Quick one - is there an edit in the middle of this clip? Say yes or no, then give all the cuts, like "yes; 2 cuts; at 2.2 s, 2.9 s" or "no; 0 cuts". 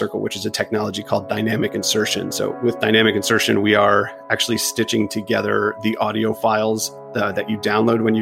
no; 0 cuts